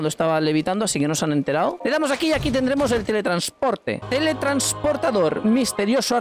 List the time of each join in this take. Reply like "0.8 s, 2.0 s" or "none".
1.8 s, 4.0 s